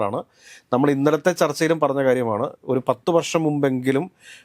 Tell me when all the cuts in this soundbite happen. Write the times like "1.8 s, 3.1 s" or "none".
none